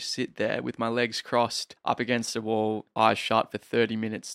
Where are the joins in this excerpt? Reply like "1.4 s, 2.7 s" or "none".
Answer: 1.7 s